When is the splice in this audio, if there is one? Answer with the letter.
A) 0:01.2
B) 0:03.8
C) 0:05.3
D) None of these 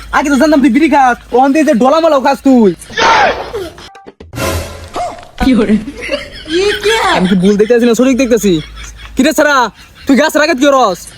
B